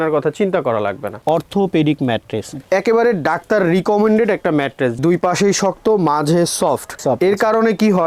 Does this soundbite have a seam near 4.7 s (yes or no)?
no